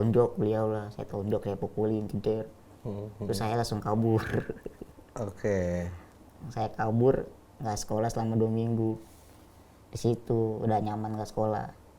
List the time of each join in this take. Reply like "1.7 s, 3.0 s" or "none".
none